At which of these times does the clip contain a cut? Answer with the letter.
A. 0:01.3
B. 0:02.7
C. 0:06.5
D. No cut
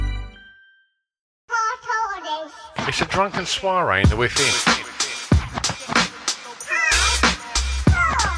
A